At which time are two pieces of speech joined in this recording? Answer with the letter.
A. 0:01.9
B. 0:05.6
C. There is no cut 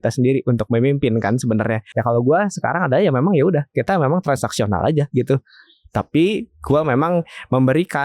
A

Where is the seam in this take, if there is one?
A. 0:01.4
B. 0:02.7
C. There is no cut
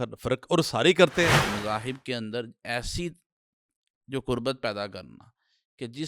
A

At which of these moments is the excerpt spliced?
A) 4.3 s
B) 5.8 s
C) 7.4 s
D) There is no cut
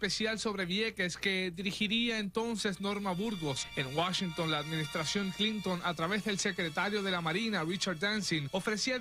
C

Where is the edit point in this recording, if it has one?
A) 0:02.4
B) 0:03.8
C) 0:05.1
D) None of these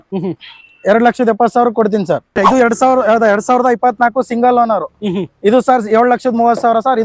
A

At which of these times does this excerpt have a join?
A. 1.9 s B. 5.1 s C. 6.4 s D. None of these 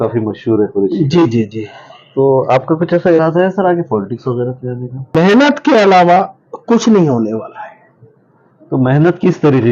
B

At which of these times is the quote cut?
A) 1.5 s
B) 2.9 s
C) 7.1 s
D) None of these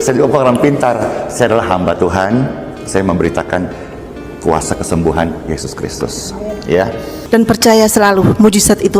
C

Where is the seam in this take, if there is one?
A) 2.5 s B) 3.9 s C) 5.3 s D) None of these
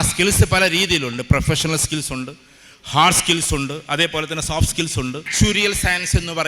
C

